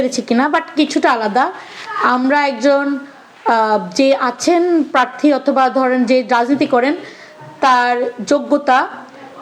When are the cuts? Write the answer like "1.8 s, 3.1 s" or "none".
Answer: none